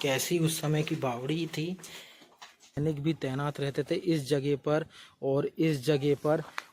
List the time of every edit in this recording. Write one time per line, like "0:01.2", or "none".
0:02.8

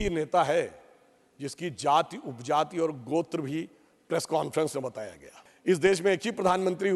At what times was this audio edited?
0:05.6

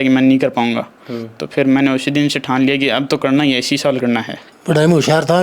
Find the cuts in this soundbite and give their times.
0:04.4

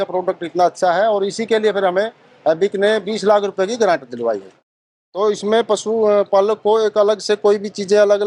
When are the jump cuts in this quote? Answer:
0:04.8

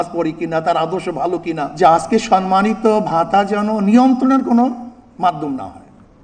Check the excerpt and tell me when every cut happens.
0:01.7

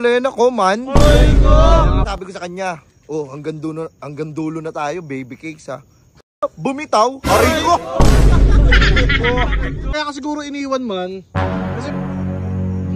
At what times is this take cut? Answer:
0:02.0
0:09.9

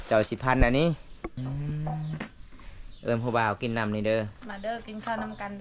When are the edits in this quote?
0:01.4

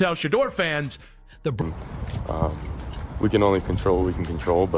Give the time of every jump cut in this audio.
0:01.6

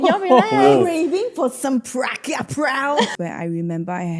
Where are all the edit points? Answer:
0:03.1

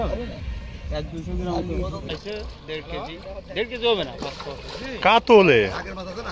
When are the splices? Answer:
0:02.2

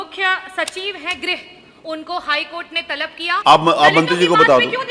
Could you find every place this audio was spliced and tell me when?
0:03.4

